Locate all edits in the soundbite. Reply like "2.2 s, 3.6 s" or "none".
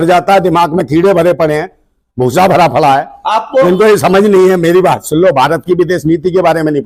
none